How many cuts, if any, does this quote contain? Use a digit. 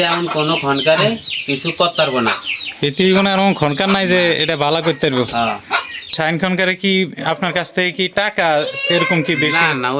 1